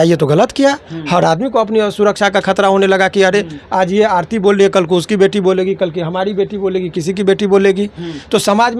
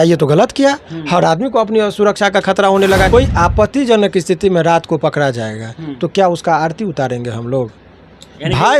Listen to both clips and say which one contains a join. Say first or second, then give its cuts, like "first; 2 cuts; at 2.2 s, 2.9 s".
second; 1 cut; at 3.1 s